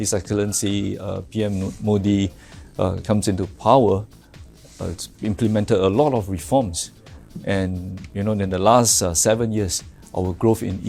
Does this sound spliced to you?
no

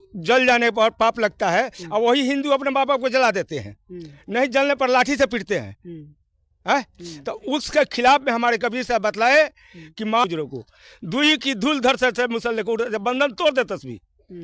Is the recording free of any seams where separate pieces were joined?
no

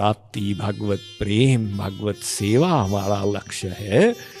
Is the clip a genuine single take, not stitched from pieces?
yes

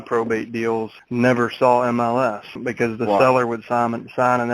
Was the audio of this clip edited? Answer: yes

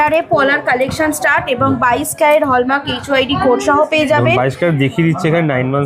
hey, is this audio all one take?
yes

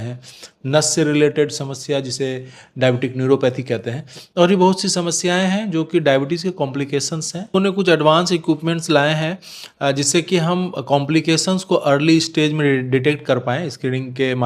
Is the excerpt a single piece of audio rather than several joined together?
no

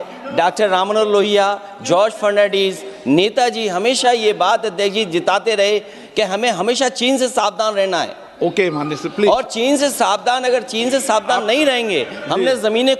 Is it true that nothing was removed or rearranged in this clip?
yes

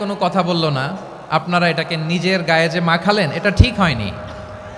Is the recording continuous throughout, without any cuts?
yes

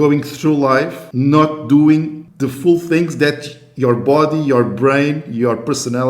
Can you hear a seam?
yes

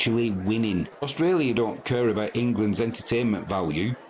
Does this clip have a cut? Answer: yes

